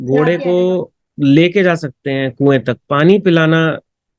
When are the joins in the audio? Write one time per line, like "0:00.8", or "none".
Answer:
0:01.0